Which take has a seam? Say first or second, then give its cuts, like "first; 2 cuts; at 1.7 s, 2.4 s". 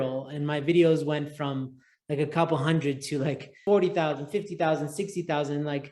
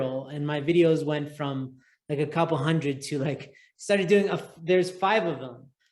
first; 1 cut; at 3.5 s